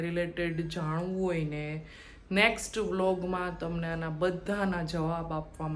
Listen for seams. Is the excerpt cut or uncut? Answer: uncut